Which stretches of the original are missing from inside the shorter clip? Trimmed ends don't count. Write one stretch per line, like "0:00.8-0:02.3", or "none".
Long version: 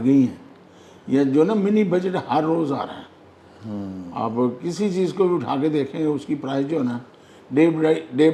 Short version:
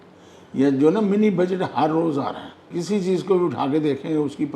0:03.3-0:04.6